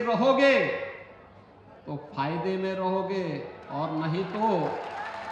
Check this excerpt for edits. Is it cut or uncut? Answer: uncut